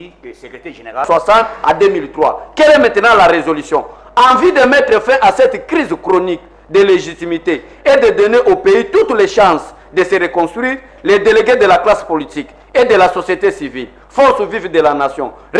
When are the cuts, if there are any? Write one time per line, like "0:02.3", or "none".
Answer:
0:01.1